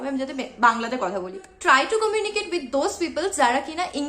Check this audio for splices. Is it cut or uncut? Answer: cut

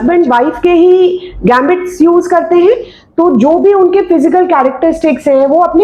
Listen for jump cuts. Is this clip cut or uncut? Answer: uncut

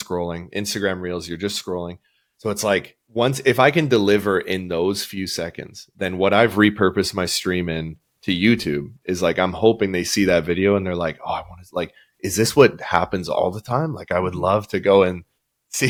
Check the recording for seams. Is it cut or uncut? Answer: uncut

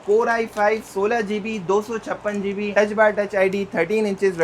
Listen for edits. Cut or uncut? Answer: uncut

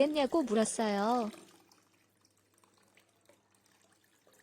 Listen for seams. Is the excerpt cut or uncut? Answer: cut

